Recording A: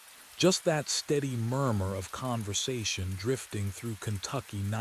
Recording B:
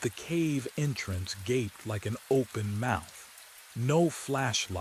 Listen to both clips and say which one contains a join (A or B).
B